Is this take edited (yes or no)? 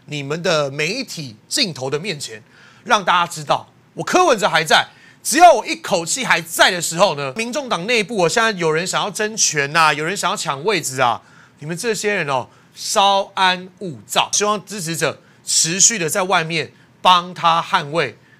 yes